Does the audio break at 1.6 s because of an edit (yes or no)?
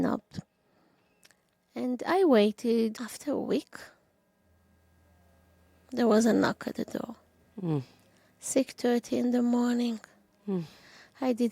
no